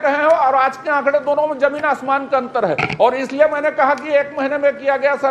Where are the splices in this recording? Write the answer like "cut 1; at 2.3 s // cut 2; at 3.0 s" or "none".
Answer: none